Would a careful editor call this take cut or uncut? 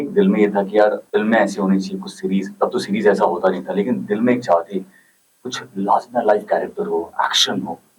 cut